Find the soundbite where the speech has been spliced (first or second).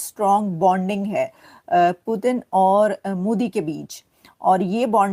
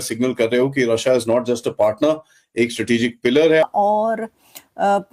second